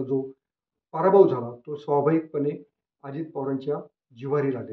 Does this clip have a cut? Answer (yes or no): no